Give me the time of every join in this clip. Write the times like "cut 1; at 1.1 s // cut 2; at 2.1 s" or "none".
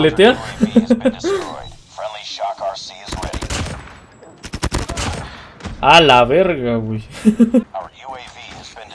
cut 1; at 7.6 s